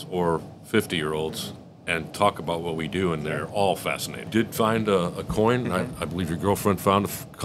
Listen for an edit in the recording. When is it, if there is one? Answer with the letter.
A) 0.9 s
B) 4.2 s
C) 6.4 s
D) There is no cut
B